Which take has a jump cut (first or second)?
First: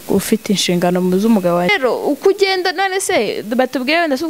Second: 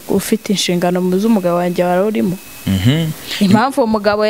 first